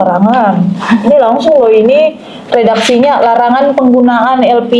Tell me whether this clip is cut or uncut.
uncut